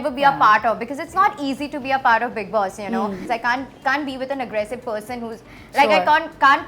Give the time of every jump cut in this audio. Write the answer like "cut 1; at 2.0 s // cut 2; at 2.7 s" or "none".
cut 1; at 3.2 s